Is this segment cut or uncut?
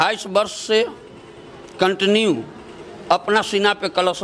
uncut